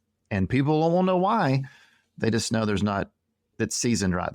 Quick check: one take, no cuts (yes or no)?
yes